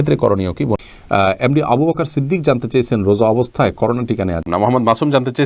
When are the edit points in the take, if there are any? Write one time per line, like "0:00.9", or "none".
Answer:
0:00.8
0:04.4